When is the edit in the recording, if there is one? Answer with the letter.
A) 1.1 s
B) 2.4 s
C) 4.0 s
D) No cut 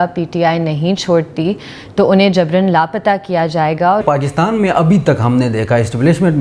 C